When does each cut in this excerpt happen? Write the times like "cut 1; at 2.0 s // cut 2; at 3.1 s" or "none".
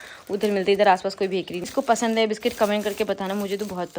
cut 1; at 1.6 s